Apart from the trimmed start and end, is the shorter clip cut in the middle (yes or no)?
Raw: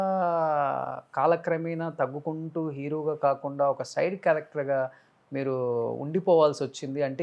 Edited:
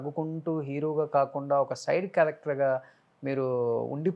no